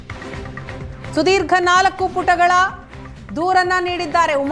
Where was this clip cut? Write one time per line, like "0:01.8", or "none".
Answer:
0:01.1